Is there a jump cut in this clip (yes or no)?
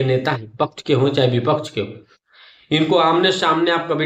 no